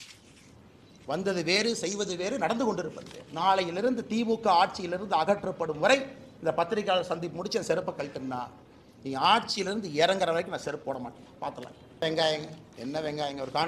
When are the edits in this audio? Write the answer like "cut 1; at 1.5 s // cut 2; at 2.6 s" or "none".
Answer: cut 1; at 12.0 s